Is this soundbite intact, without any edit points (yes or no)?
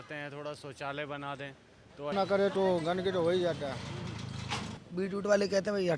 no